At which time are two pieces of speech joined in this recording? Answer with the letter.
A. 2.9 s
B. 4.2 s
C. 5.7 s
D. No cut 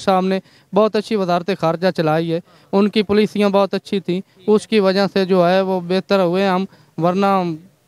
D